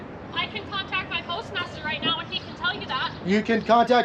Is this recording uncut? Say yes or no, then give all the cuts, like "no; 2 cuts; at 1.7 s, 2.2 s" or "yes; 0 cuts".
yes; 0 cuts